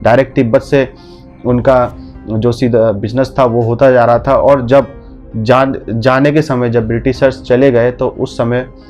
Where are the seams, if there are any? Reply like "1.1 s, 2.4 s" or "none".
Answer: none

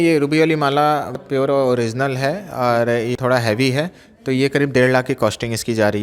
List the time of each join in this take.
1.2 s, 3.1 s

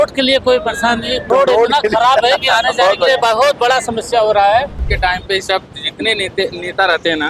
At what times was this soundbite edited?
1.3 s, 4.9 s

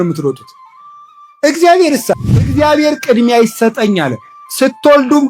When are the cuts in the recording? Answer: 2.5 s

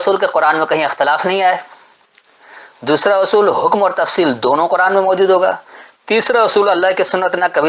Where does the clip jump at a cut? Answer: none

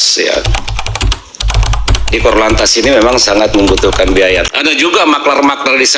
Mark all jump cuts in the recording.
4.5 s

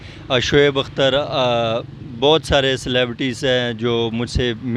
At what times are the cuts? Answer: none

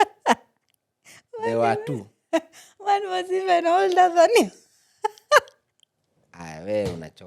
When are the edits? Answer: none

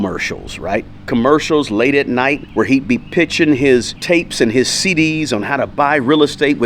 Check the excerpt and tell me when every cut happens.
2.4 s, 3.9 s

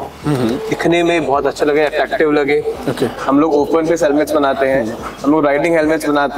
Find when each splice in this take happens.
3.2 s

